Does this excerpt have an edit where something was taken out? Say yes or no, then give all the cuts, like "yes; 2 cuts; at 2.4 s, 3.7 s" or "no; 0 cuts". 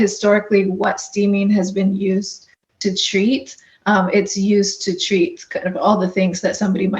no; 0 cuts